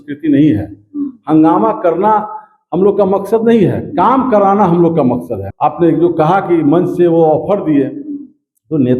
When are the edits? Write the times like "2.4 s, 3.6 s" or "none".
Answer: 5.4 s